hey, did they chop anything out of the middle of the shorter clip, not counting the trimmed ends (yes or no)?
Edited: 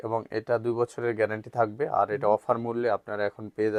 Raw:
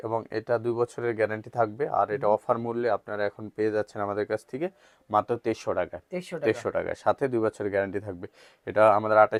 no